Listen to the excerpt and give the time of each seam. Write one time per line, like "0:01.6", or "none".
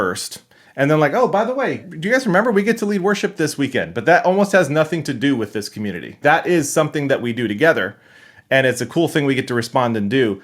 0:01.8
0:06.2